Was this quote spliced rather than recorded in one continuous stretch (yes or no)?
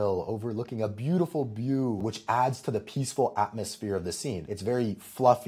yes